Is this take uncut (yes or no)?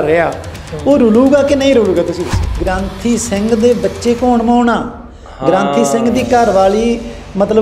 no